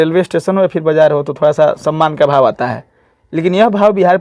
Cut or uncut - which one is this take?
uncut